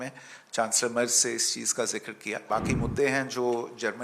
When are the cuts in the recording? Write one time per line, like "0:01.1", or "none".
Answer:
0:02.3